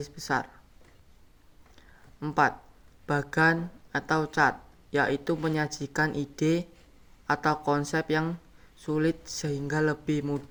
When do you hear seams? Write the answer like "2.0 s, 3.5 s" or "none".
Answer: none